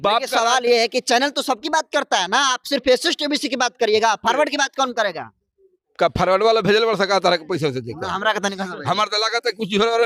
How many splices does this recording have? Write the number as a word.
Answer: zero